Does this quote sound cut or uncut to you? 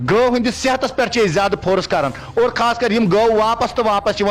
uncut